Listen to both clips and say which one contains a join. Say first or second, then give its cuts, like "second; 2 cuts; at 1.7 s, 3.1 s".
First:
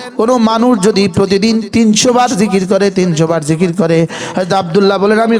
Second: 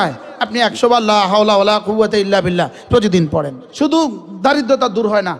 second; 1 cut; at 3.6 s